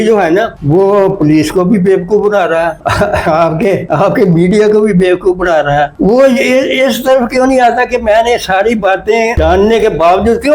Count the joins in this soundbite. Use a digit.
0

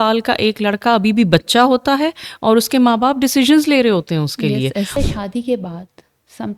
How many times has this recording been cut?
1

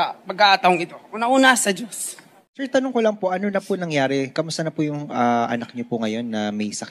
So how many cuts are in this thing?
1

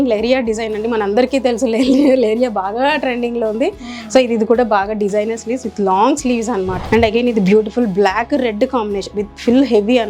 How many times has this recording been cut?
1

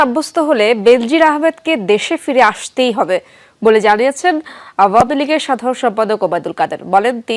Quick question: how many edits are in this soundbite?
0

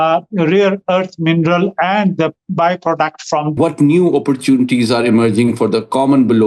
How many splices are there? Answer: 1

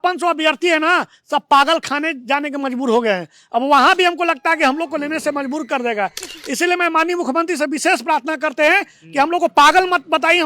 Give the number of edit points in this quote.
0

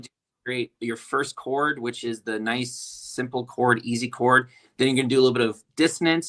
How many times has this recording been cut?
0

